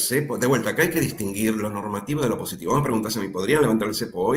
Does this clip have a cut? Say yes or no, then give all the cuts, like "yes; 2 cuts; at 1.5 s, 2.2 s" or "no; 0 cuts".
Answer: no; 0 cuts